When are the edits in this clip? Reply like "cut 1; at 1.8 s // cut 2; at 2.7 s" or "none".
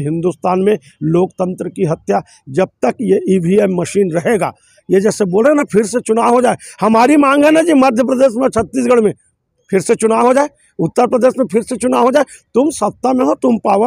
none